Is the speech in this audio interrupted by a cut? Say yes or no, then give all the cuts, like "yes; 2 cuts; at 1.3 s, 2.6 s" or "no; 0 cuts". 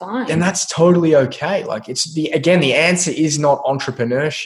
no; 0 cuts